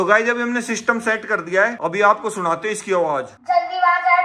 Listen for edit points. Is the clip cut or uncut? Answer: uncut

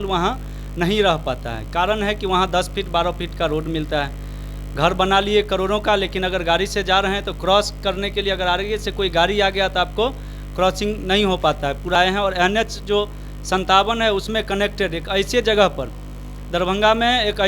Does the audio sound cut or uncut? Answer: cut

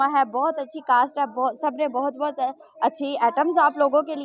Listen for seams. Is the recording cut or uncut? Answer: uncut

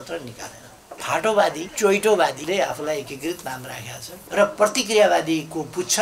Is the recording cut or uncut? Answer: cut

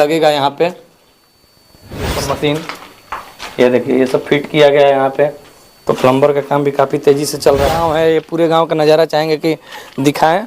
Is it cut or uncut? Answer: cut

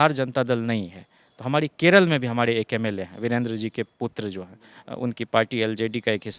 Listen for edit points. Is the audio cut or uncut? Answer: uncut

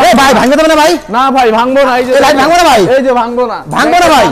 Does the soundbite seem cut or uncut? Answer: uncut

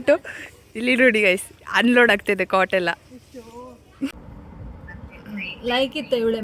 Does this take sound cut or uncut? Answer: cut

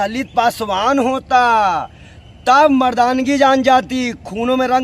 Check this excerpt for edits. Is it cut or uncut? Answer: uncut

